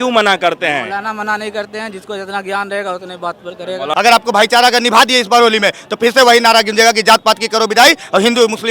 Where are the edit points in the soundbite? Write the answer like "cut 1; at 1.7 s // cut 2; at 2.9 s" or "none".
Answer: cut 1; at 3.9 s